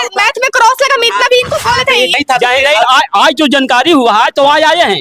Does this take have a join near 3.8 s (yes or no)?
no